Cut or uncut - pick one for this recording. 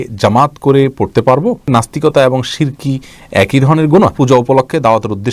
cut